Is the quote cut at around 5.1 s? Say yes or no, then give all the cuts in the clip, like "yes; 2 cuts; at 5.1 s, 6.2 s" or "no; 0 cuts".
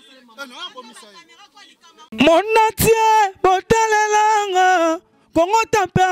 no; 1 cut; at 2.1 s